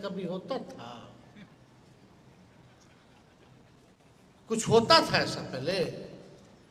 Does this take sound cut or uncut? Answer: uncut